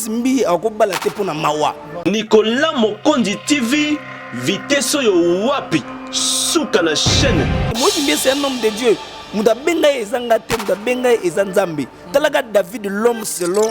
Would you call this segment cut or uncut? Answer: cut